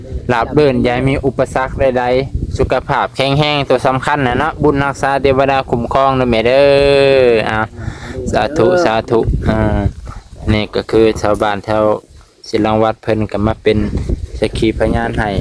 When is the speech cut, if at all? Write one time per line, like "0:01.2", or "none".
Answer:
none